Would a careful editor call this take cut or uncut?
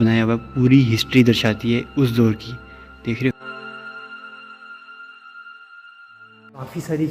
uncut